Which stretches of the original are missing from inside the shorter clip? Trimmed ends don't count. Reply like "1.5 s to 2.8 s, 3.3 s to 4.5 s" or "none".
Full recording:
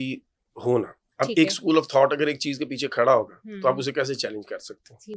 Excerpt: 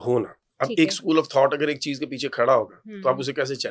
none